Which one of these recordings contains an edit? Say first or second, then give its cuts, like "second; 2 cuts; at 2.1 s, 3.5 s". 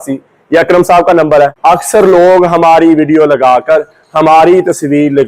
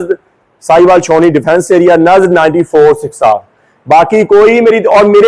first; 1 cut; at 1.6 s